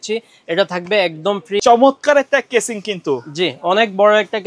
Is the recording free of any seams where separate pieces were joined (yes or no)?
no